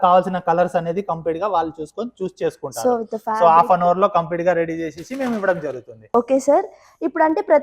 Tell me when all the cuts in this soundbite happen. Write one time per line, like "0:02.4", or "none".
none